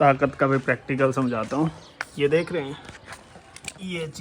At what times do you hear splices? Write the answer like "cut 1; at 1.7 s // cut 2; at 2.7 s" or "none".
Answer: none